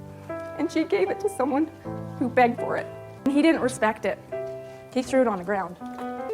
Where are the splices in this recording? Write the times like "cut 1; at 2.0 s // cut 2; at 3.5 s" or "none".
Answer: cut 1; at 3.3 s